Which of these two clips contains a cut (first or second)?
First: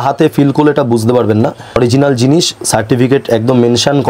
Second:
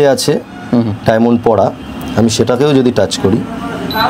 first